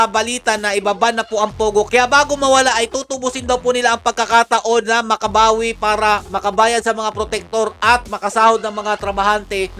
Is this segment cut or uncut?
uncut